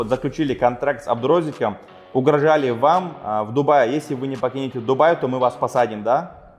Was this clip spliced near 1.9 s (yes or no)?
no